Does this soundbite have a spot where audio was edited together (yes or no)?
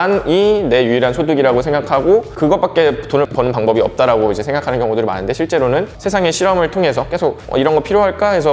yes